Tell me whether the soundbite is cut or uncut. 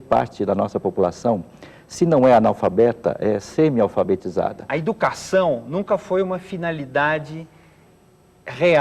cut